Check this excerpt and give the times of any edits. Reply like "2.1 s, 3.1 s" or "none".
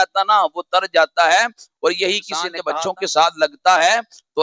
2.5 s